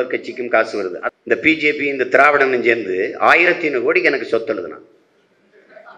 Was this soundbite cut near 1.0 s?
yes; 1 cut; at 1.0 s

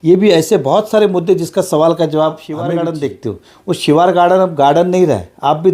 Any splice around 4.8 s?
no; 1 cut; at 2.7 s

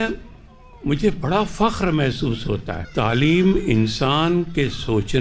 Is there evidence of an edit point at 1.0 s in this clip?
no; 1 cut; at 2.8 s

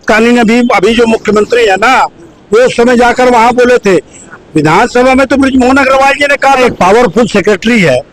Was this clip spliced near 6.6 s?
yes; 1 cut; at 6.6 s

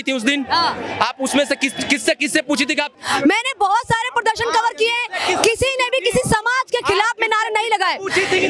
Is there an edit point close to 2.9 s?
yes; 1 cut; at 2.9 s

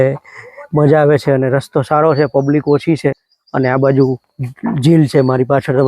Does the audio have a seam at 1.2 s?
no; 1 cut; at 3.2 s

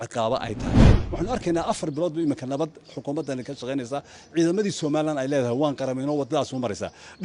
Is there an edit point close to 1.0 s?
yes; 1 cut; at 1.0 s

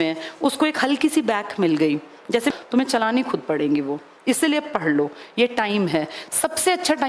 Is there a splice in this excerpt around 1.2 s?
no; 1 cut; at 2.5 s

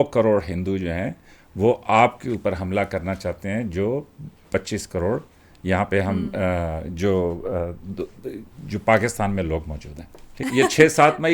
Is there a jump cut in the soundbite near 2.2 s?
no; 1 cut; at 10.3 s

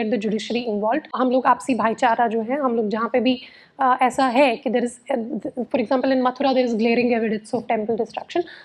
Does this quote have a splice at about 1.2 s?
yes; 1 cut; at 1.2 s

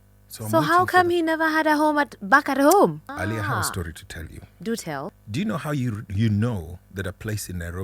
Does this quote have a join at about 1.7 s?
no; 2 cuts; at 3.1 s, 5.1 s

